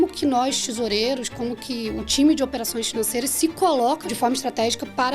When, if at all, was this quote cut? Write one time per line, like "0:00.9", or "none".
0:04.1